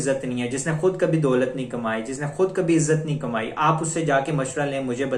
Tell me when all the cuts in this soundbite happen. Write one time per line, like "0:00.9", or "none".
none